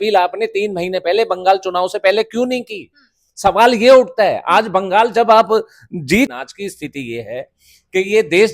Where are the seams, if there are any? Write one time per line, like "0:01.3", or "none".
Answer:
0:06.3